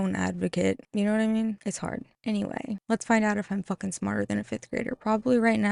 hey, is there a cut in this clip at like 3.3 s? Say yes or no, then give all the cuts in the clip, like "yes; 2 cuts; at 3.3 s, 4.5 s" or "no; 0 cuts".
no; 0 cuts